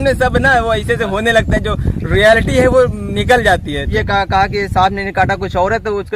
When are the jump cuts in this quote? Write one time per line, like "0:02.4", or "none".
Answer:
0:03.9